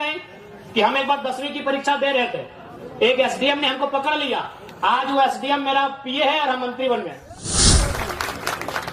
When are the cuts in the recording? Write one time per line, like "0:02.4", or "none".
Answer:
0:07.5

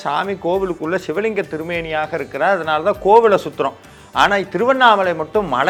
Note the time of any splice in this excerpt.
none

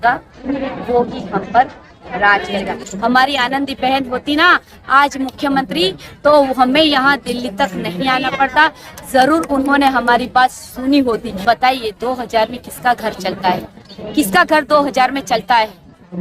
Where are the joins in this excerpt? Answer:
0:02.9
0:11.3

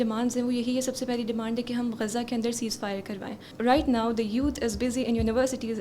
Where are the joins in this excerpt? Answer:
0:03.5

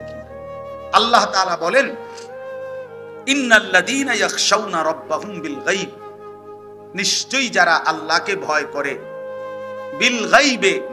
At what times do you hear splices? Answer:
0:00.9
0:01.9
0:03.1

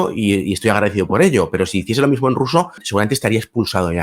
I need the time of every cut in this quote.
0:02.8

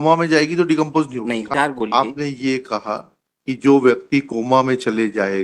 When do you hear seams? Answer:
0:01.5

